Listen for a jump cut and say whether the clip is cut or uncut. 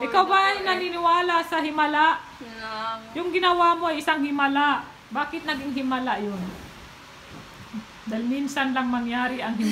cut